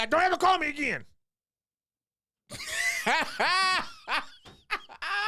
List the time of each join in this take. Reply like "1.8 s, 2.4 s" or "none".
none